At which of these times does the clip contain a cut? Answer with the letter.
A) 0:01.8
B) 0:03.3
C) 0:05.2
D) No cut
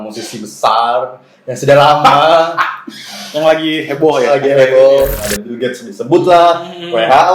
C